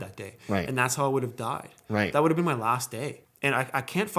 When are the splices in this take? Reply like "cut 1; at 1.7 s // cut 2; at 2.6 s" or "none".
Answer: cut 1; at 3.2 s